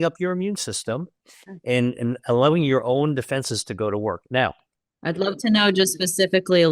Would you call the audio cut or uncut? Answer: uncut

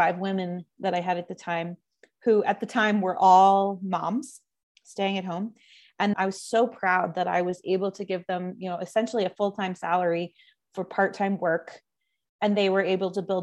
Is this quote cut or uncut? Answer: cut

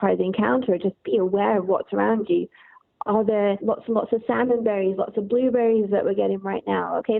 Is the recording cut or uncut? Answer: cut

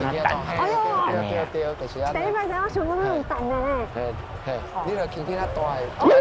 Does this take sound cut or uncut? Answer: uncut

